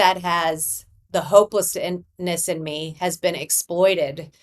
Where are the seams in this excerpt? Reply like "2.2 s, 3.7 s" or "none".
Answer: 0.9 s